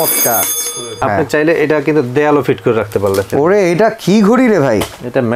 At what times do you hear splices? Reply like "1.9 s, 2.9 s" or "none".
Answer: 1.0 s, 3.3 s